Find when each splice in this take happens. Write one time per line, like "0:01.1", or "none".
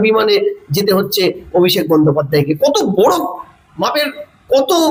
none